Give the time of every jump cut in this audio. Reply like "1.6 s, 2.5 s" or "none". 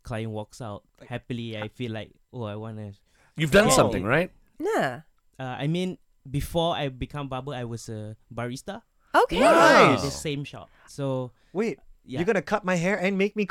0.9 s